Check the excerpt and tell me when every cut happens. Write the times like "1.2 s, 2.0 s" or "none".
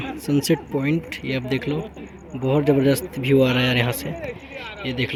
none